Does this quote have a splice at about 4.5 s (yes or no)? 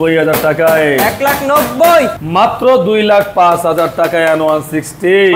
no